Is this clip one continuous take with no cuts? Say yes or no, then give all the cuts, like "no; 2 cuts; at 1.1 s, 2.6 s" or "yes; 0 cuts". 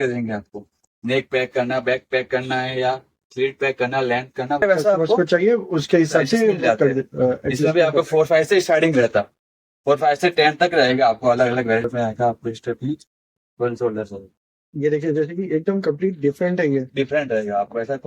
no; 2 cuts; at 4.6 s, 11.8 s